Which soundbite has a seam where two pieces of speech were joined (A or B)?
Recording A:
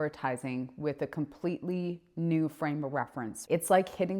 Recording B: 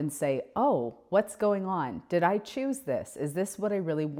A